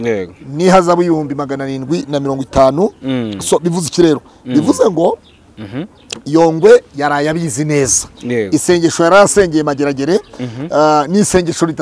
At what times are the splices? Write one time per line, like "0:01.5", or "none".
none